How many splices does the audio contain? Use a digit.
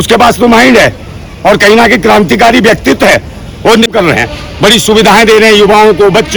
1